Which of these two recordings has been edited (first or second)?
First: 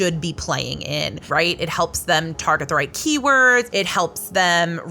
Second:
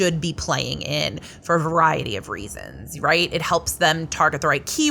first